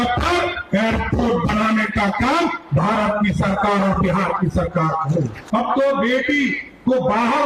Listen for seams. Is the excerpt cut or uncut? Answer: cut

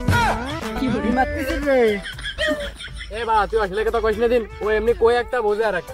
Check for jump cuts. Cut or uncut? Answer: uncut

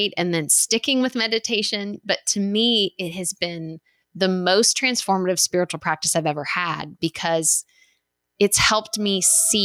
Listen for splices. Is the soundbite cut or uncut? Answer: uncut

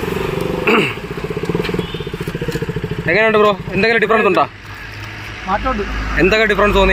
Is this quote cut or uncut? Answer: uncut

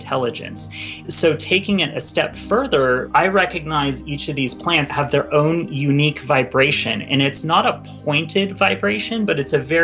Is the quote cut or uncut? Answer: cut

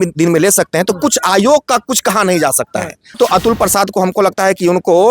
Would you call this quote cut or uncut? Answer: cut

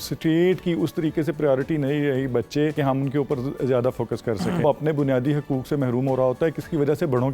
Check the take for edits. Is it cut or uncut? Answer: cut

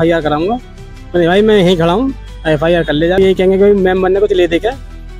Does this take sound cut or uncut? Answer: cut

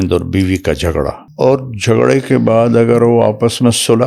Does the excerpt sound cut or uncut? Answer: cut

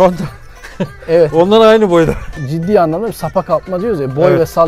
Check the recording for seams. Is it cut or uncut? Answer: cut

